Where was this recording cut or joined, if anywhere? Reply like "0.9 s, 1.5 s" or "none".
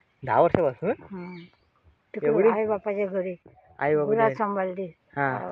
none